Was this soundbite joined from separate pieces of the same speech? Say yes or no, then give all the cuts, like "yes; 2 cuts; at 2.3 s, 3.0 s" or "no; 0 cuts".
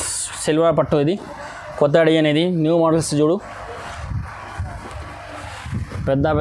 no; 0 cuts